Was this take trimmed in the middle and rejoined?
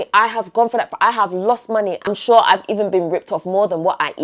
yes; 1 cut; at 2.0 s

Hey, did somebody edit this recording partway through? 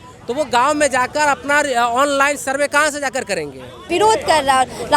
yes; 1 cut; at 3.9 s

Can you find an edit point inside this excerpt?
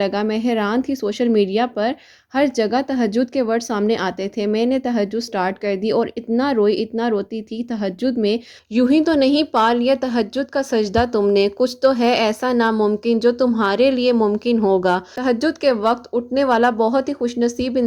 yes; 2 cuts; at 8.5 s, 15.1 s

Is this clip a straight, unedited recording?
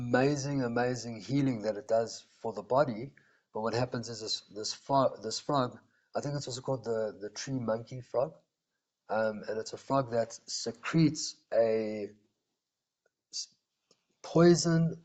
yes; 0 cuts

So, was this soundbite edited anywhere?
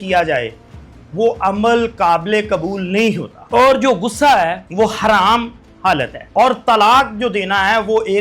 yes; 3 cuts; at 3.3 s, 4.6 s, 6.2 s

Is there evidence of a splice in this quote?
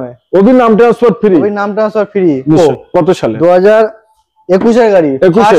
no; 0 cuts

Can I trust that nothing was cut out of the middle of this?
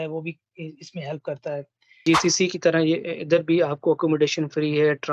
no; 1 cut; at 2.0 s

